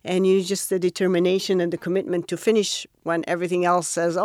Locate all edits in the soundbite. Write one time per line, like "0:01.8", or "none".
none